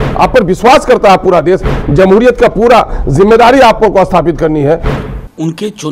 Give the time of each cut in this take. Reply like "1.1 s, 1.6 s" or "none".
5.0 s